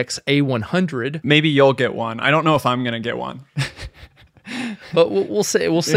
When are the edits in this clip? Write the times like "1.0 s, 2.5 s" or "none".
1.2 s